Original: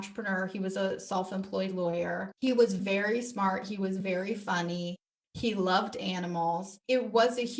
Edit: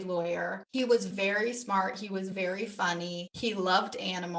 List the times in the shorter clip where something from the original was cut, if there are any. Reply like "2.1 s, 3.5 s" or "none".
3.2 s